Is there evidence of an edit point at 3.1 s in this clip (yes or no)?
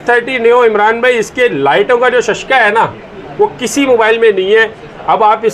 no